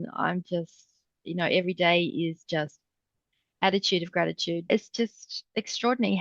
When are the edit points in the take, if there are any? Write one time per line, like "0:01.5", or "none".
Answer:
0:04.7